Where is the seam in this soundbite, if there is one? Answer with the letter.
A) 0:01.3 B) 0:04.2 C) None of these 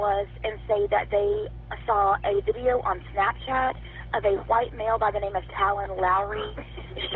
C